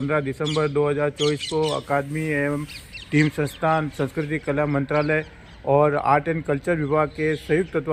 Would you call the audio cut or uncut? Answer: uncut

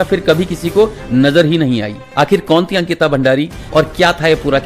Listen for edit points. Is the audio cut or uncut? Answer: cut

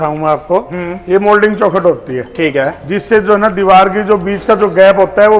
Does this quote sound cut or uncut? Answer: uncut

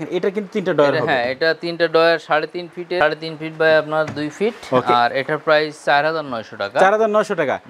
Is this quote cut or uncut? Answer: uncut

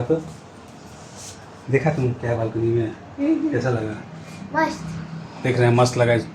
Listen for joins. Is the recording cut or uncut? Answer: uncut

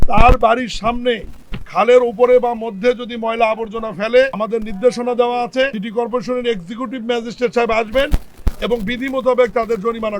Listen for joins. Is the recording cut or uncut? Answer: cut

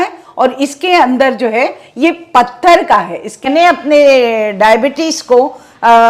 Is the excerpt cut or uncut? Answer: cut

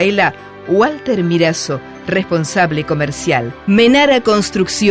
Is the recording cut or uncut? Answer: cut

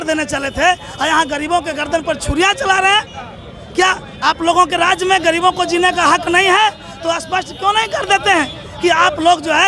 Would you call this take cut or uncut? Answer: uncut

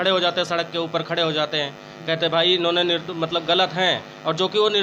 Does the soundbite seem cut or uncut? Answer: uncut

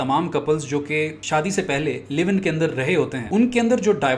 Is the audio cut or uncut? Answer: cut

